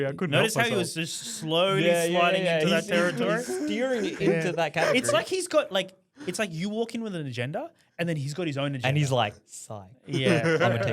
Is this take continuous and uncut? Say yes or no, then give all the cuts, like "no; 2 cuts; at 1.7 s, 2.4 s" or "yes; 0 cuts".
yes; 0 cuts